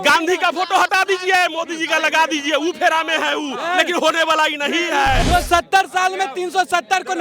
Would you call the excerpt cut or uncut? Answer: cut